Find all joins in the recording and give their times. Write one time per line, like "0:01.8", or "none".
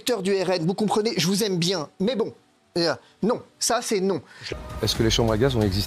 0:04.4

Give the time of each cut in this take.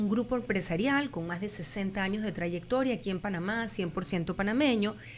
none

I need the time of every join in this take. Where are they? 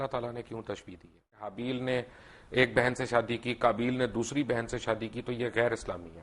0:01.6

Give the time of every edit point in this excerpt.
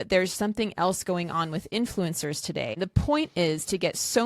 0:02.7

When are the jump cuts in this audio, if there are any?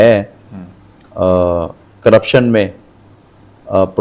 none

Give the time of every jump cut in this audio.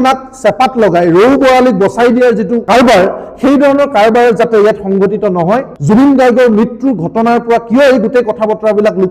0:02.6
0:05.7

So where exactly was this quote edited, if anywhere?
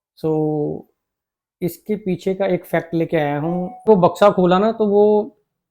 0:03.9

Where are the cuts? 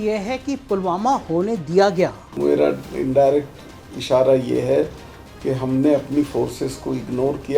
0:02.3

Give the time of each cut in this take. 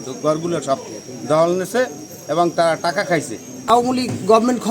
0:03.5

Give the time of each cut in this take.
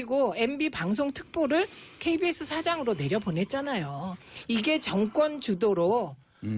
0:02.3

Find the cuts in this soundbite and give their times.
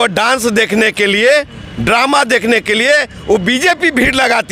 none

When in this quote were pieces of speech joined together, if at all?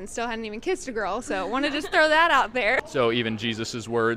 0:02.8

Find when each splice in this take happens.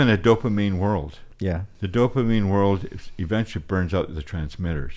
0:01.3

